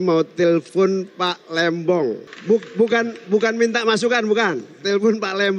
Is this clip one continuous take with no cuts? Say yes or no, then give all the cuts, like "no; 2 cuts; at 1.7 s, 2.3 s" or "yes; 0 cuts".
no; 1 cut; at 2.3 s